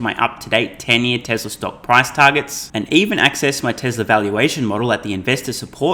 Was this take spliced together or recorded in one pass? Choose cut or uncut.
uncut